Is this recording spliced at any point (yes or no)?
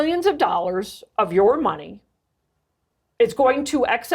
yes